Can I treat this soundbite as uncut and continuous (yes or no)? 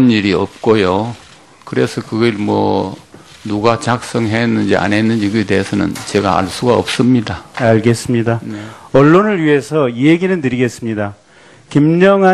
no